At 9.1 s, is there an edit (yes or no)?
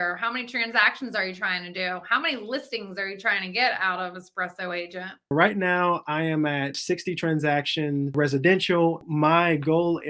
yes